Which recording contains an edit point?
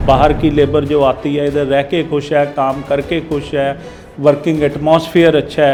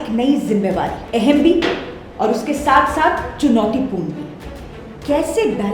second; 1 cut; at 1.0 s

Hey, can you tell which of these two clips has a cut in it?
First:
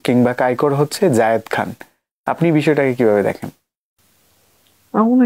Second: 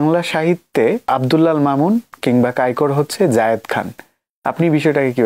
second; 1 cut; at 1.1 s

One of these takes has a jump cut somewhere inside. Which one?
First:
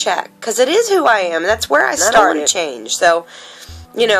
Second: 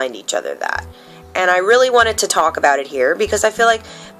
first; 1 cut; at 2.4 s

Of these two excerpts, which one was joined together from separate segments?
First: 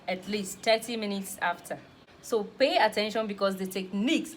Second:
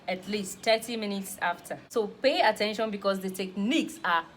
second; 1 cut; at 1.7 s

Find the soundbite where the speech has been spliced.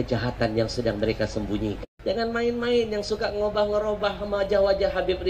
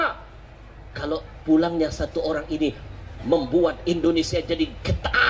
first; 1 cut; at 1.9 s

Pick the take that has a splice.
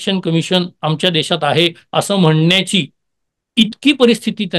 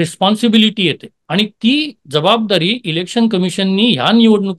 second; 1 cut; at 1.1 s

